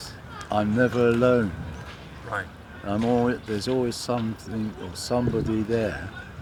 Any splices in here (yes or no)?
no